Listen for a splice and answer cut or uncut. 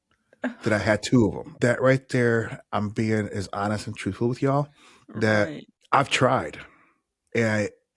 cut